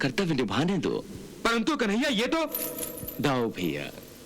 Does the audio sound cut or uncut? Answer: uncut